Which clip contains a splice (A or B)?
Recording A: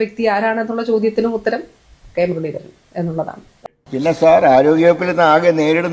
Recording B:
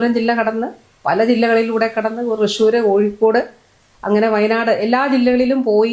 A